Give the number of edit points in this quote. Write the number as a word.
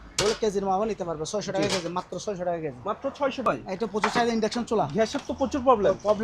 one